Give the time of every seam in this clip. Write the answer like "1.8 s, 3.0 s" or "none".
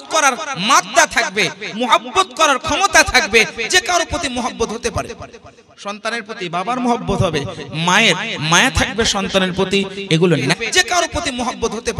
10.6 s